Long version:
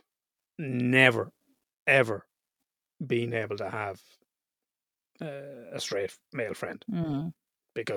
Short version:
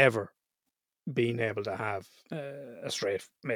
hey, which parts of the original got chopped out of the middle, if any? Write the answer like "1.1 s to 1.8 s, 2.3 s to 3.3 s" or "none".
4.1 s to 5.0 s

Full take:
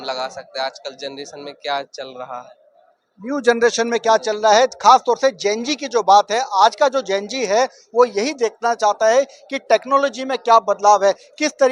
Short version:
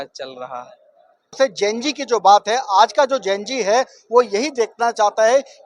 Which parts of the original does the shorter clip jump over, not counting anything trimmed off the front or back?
3.1 s to 5.2 s

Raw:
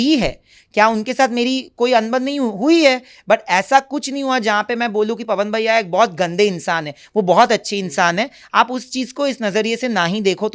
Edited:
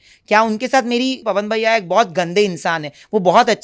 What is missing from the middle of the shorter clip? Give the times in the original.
1.7 s to 5.2 s

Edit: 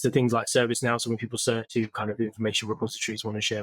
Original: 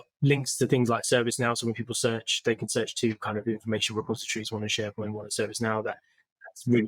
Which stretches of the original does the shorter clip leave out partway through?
2.2 s to 2.9 s

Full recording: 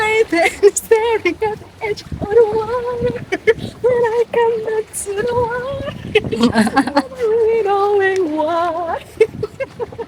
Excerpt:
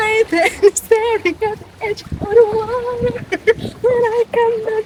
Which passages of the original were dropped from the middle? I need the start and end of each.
none

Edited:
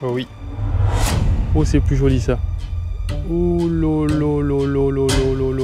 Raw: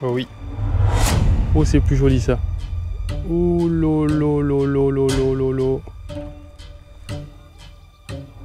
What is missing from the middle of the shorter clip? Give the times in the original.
none

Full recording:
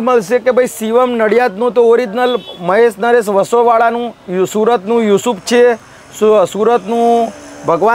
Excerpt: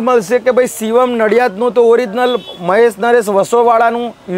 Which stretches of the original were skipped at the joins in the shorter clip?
none

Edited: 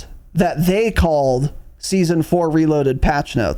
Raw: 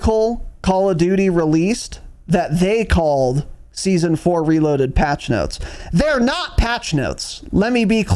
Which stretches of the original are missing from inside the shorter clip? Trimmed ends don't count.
none

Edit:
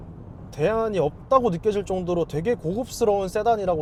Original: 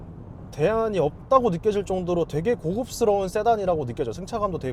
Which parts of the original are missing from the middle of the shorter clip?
none

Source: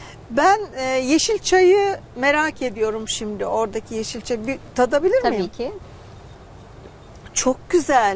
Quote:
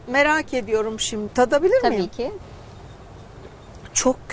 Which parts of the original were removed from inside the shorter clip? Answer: 3.3 s to 4.7 s

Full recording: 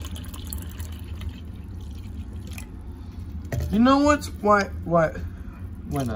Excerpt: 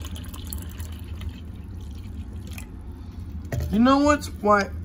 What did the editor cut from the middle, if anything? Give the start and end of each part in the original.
none

